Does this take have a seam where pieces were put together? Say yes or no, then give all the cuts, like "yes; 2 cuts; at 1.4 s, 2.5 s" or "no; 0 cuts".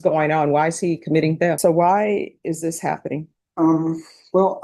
yes; 1 cut; at 1.6 s